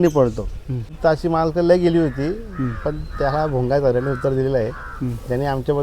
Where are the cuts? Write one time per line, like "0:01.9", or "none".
0:01.0